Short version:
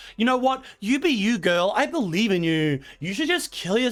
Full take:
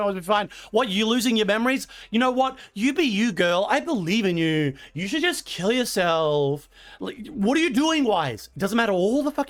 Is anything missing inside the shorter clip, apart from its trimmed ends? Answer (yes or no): no